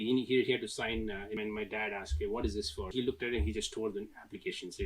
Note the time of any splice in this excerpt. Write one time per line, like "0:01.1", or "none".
0:01.4
0:02.9